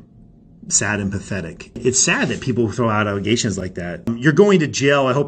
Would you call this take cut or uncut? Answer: cut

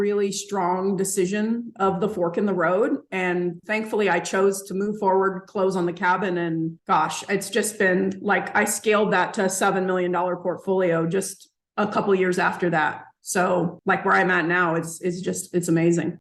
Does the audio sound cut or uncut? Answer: uncut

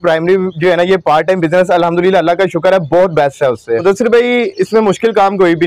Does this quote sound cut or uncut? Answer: cut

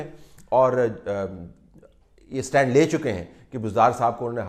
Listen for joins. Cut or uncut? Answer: uncut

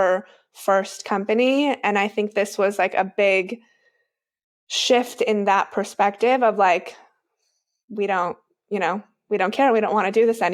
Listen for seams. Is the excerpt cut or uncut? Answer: uncut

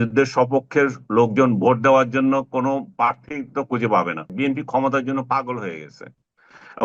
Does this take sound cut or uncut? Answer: cut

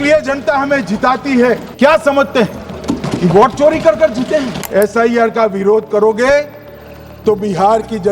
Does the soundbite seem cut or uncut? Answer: cut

